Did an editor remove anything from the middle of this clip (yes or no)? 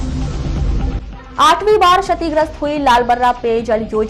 yes